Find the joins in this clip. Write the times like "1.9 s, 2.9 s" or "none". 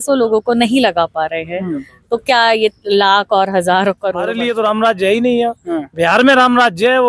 4.3 s